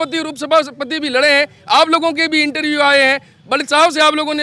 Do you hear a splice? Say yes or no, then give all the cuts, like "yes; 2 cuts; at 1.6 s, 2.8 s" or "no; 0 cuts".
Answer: no; 0 cuts